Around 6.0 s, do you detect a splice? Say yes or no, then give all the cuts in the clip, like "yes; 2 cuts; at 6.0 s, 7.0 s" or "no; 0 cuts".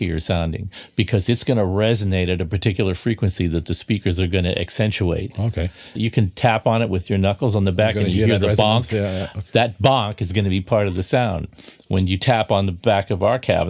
yes; 1 cut; at 6.0 s